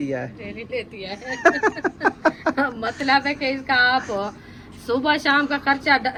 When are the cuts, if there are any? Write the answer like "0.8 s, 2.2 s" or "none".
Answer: none